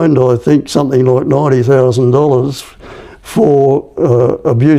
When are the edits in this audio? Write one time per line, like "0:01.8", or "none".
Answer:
none